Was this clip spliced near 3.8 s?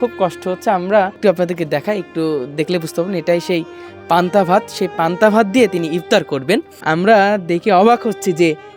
no; 2 cuts; at 1.2 s, 6.7 s

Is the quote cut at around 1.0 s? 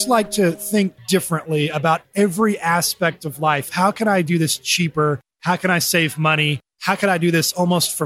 yes; 1 cut; at 1.0 s

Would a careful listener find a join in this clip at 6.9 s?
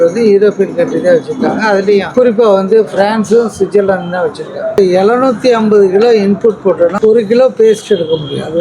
yes; 3 cuts; at 2.1 s, 4.8 s, 6.9 s

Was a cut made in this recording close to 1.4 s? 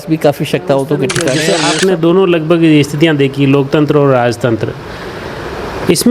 yes; 1 cut; at 1.4 s

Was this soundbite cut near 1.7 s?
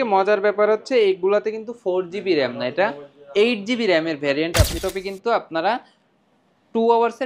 no; 1 cut; at 4.8 s

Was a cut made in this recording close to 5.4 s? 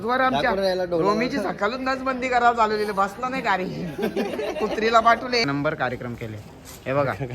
yes; 1 cut; at 5.4 s

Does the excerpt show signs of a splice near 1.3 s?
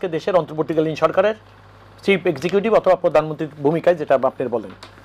no; 0 cuts

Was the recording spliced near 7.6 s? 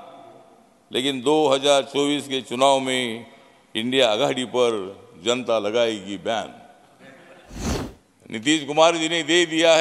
yes; 1 cut; at 7.6 s

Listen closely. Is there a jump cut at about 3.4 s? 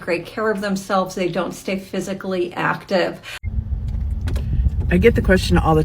yes; 1 cut; at 3.4 s

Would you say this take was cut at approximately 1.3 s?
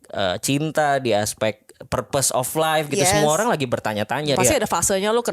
no; 1 cut; at 4.4 s

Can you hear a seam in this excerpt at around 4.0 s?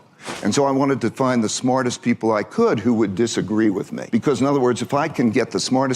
yes; 1 cut; at 4.0 s

